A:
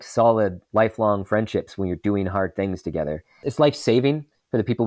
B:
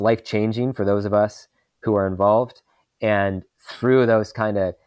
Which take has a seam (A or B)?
A